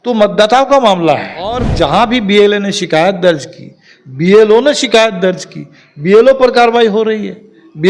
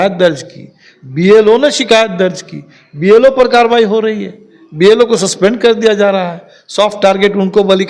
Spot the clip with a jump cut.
first; 1 cut; at 1.7 s

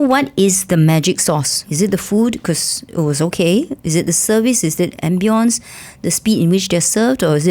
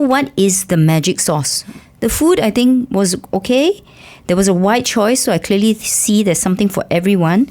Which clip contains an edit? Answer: first; 1 cut; at 1.6 s

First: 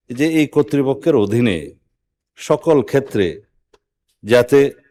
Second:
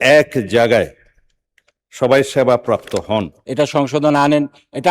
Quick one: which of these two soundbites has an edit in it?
second; 1 cut; at 3.4 s

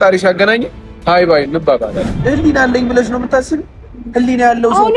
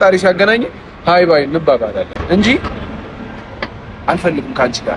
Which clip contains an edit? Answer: first; 1 cut; at 2.1 s

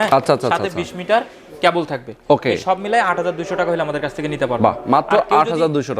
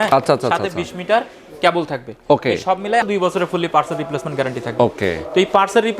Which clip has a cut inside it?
second; 1 cut; at 3.0 s

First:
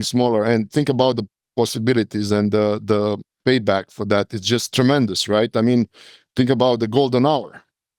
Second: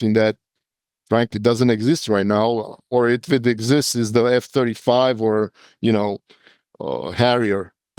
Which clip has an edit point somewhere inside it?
first; 2 cuts; at 1.4 s, 4.7 s

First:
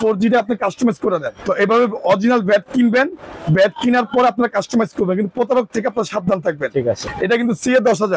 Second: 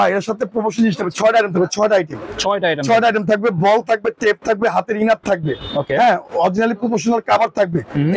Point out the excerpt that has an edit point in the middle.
first; 2 cuts; at 1.3 s, 7.0 s

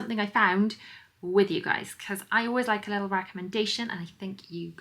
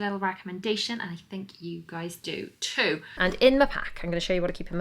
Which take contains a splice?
second; 1 cut; at 3.1 s

